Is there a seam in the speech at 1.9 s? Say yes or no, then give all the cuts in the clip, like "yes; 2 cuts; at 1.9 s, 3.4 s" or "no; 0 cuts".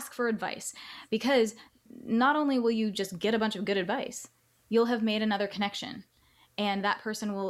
yes; 1 cut; at 1.9 s